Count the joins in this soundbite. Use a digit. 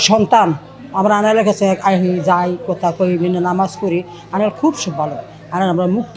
0